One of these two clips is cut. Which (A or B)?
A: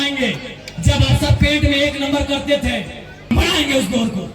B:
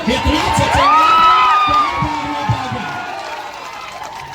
A